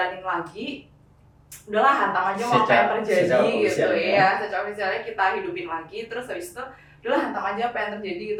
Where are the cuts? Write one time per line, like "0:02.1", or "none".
none

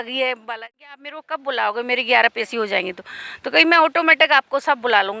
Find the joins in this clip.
0:01.1

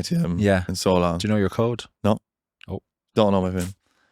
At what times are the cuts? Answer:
0:01.9

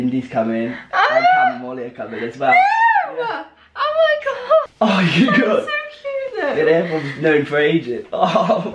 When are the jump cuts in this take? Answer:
0:04.7

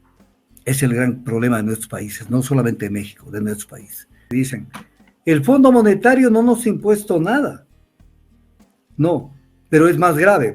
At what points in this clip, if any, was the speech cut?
0:04.2

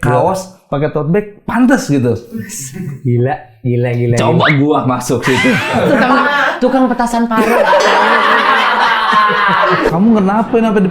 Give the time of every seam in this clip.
0:09.9

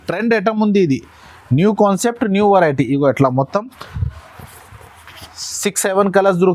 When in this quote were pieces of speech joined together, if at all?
none

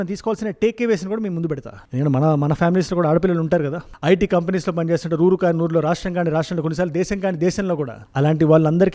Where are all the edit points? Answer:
none

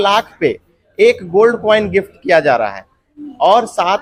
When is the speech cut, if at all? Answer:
none

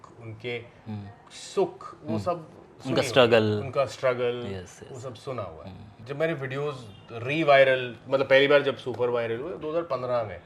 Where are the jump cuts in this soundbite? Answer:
0:06.0

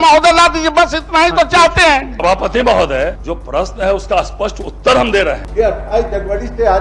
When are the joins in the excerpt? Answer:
0:02.1
0:03.3
0:05.4

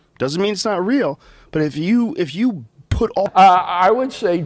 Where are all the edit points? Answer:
0:03.3

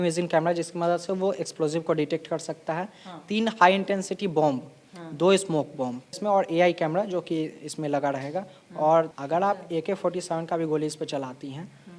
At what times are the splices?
0:06.2
0:09.1

